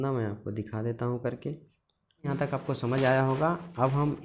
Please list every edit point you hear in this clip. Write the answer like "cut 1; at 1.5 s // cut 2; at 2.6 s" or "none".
cut 1; at 2.3 s